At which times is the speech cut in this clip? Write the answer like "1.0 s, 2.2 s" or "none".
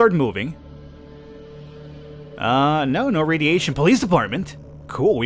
none